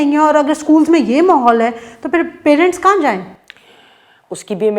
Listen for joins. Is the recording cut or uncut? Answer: uncut